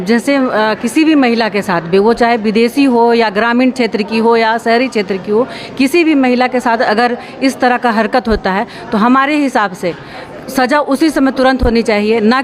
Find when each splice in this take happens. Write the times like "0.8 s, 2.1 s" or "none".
none